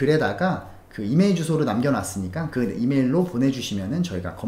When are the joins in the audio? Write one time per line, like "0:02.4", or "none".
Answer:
none